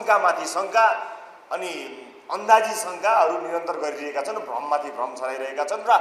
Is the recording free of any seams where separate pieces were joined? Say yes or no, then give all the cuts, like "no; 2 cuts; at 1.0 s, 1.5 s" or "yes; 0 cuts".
yes; 0 cuts